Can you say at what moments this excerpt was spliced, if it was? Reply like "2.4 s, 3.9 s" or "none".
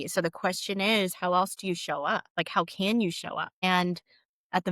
2.3 s, 3.5 s